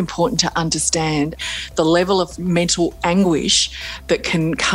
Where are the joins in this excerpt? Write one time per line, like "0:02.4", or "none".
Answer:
0:01.4